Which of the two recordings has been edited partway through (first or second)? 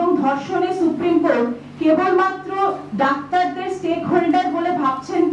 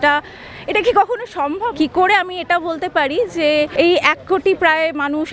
second